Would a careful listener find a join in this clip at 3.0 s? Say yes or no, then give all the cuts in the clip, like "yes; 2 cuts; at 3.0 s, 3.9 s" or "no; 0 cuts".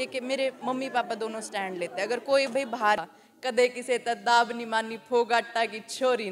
yes; 1 cut; at 3.0 s